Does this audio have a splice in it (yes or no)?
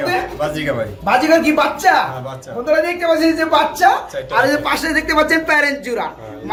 no